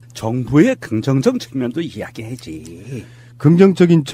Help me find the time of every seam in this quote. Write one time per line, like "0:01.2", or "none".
0:01.2

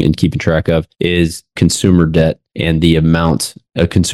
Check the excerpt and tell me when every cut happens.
none

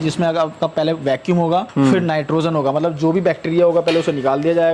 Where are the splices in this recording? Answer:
0:01.7

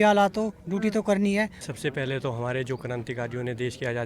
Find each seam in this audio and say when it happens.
0:01.6

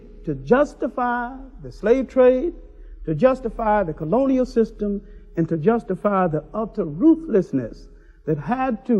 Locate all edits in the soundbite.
none

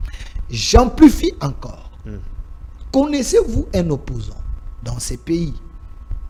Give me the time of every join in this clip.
none

